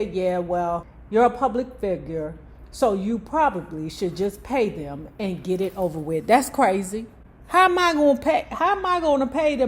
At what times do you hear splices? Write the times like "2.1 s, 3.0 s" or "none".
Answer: 0.9 s

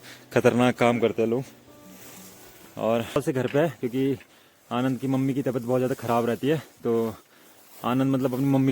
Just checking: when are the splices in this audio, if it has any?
3.2 s

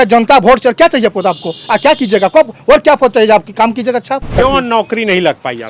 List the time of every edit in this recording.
4.4 s

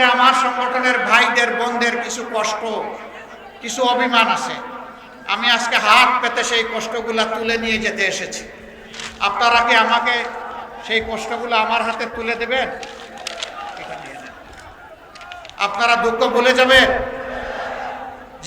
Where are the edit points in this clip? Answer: none

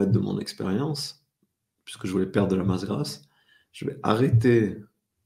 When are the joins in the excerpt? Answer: none

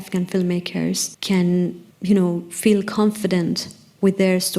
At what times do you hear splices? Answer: 1.1 s, 1.9 s

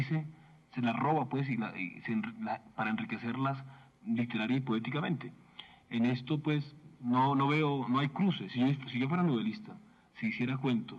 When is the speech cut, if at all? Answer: 1.5 s

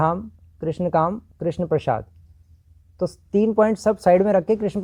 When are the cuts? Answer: none

